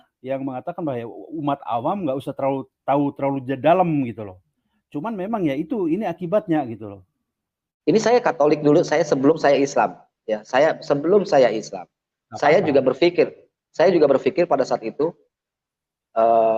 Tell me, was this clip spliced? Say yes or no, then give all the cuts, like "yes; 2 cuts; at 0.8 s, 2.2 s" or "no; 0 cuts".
yes; 1 cut; at 7.6 s